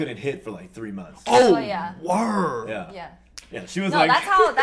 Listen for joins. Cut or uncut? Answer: uncut